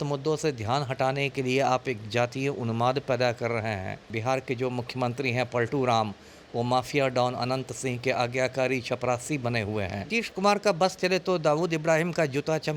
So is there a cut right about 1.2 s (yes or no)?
no